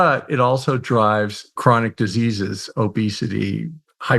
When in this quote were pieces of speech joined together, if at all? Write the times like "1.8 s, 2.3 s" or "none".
1.6 s